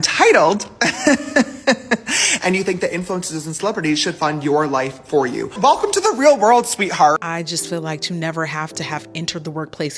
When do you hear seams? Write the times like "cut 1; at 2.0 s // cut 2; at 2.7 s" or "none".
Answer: cut 1; at 5.5 s // cut 2; at 7.2 s